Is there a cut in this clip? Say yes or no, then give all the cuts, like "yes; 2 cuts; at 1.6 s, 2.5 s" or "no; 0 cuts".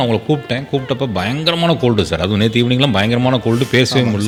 no; 0 cuts